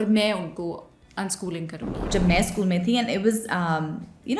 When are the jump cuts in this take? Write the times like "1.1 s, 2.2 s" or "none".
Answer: 2.1 s